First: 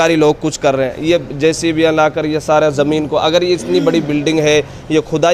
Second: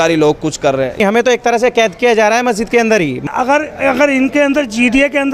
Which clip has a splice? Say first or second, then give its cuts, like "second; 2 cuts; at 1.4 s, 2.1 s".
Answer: second; 2 cuts; at 1.0 s, 3.3 s